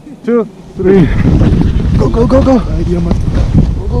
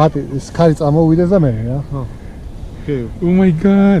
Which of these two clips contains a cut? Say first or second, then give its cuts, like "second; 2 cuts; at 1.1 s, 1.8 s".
first; 1 cut; at 1.2 s